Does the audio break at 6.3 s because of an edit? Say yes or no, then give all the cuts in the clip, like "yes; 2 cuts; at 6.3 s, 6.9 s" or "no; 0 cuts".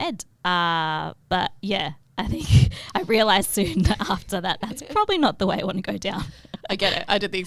no; 0 cuts